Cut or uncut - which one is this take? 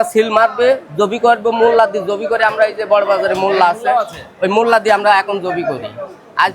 uncut